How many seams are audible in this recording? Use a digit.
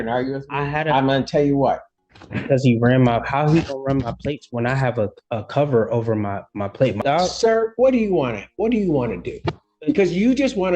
2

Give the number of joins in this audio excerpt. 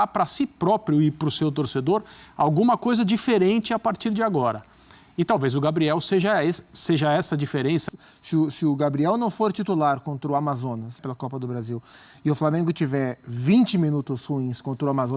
2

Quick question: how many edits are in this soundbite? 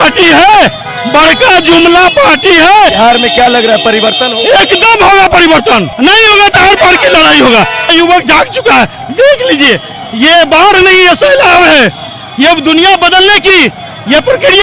3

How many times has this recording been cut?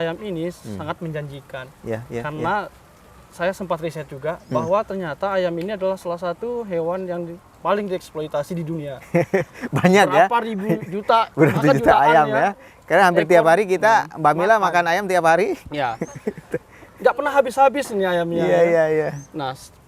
0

